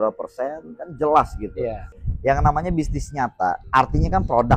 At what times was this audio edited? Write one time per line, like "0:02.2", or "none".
0:01.9
0:03.6

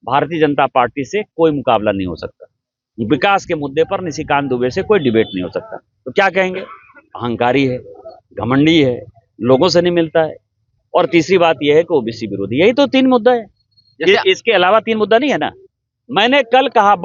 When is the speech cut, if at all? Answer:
none

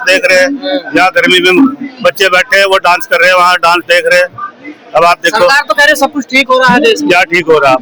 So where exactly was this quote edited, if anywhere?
none

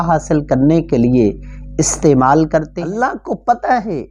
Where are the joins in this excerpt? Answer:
0:02.7

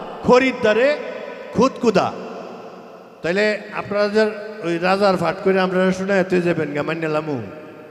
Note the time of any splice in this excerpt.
none

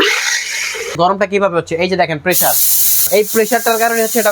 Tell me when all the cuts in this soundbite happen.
0:00.9
0:03.1

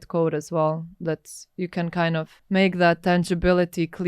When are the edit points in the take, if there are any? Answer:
0:02.4

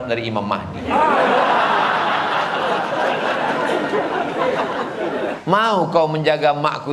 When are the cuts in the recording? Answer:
0:05.4

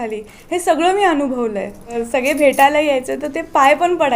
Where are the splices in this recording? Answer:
0:02.0

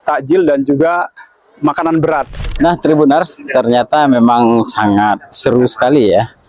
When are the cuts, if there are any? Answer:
0:02.3

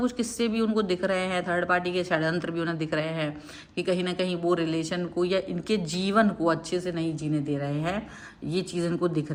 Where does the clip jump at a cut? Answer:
none

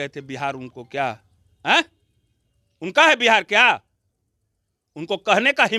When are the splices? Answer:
none

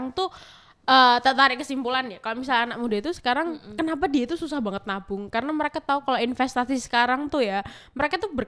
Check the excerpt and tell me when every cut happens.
none

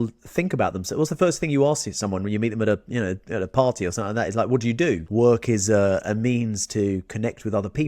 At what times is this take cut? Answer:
0:05.0

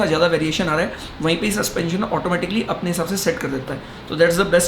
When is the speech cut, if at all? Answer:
none

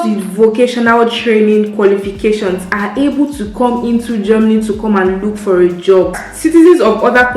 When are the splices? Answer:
0:06.2

